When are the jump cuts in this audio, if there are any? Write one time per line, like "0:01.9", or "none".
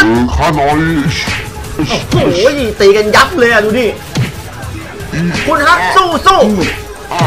none